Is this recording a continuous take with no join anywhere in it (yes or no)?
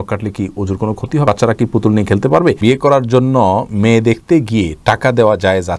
no